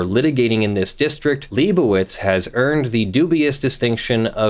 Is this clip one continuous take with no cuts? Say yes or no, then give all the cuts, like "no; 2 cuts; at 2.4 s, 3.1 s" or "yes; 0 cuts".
no; 1 cut; at 1.4 s